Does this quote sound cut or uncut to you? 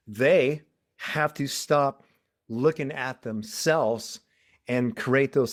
uncut